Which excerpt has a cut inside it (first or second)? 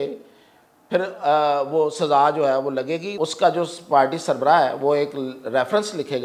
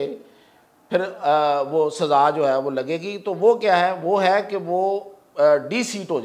first